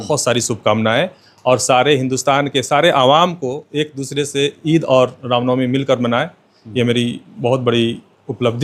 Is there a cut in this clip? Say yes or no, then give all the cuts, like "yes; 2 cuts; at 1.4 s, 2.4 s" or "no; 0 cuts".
no; 0 cuts